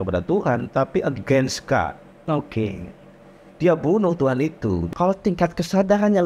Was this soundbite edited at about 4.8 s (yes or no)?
yes